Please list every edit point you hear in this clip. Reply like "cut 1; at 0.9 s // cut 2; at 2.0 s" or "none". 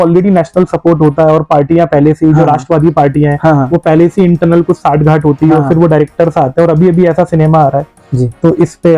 none